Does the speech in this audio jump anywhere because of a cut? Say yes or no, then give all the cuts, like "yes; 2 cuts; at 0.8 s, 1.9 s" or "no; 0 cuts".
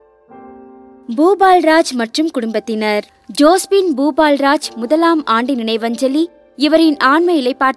yes; 1 cut; at 1.0 s